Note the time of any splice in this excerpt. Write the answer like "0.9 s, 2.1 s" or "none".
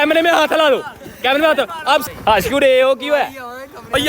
2.0 s

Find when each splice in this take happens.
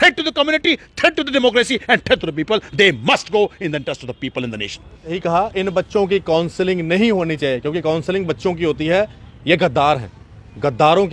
5.2 s

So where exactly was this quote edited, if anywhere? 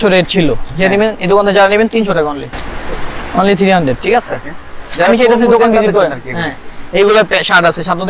none

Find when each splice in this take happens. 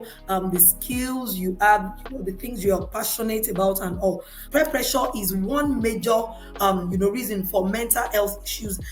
4.3 s

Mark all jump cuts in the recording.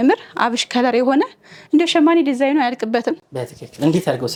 none

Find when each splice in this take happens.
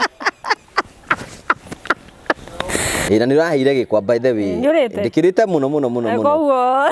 3.1 s

